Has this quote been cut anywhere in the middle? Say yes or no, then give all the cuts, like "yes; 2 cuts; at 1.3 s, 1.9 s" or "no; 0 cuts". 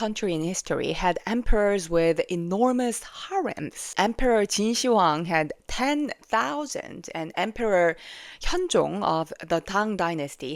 yes; 1 cut; at 3.9 s